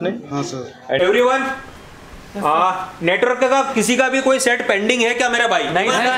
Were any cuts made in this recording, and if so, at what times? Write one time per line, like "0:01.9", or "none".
0:01.0